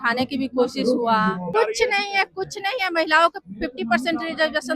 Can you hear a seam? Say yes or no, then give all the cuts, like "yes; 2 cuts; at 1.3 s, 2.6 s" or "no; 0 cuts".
yes; 1 cut; at 1.5 s